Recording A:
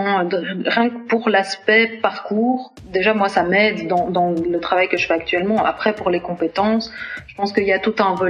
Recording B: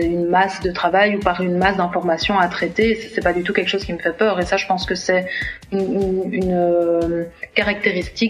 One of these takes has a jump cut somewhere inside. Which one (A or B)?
A